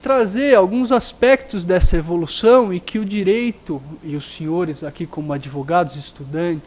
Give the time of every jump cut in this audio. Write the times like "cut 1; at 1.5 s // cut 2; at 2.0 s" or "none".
none